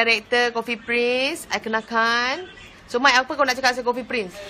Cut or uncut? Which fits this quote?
cut